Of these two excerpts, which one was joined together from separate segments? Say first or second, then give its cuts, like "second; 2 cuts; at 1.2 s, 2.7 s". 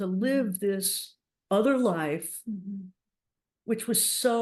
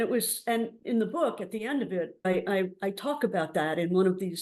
second; 1 cut; at 2.3 s